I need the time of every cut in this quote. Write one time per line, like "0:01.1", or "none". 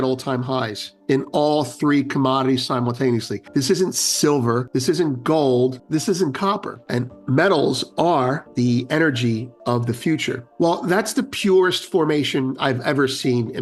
0:03.4
0:04.7
0:05.8
0:06.7
0:08.4
0:10.5